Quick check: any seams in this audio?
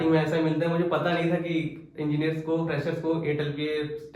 no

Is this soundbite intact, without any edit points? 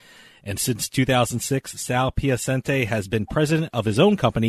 yes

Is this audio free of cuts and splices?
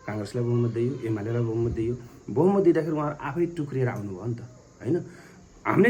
yes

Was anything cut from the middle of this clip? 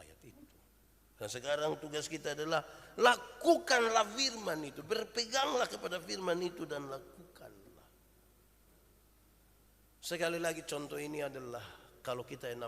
yes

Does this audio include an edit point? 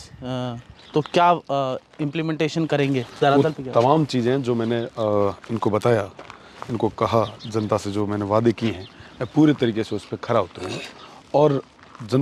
no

